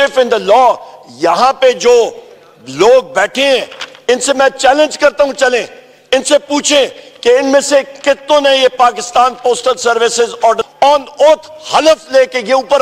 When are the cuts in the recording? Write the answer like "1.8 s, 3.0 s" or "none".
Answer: 10.6 s

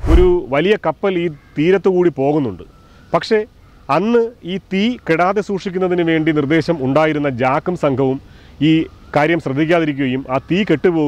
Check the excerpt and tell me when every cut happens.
none

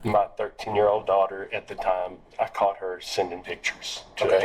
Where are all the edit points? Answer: 2.3 s

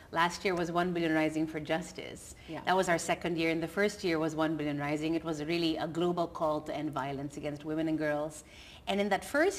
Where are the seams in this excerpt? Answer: 6.9 s

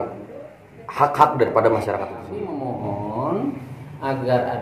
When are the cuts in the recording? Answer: 2.3 s

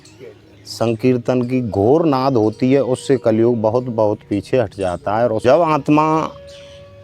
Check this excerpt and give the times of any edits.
5.4 s

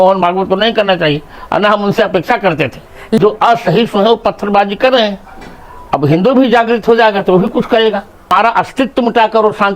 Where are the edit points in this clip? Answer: 3.2 s, 8.3 s

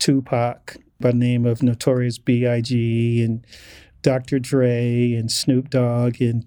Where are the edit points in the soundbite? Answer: 0.9 s

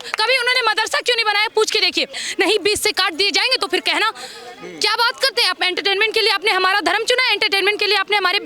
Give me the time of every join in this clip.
2.2 s

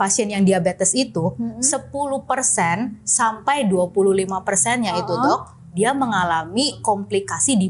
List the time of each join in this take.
6.8 s

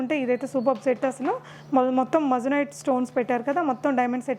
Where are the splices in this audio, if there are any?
none

